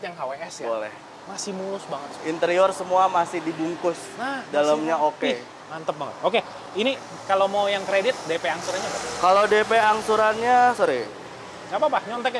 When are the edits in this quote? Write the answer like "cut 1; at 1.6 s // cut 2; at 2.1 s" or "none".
none